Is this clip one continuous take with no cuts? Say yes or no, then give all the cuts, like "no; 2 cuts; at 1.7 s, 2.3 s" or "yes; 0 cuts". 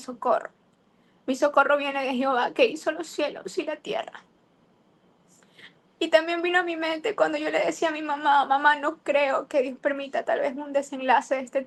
yes; 0 cuts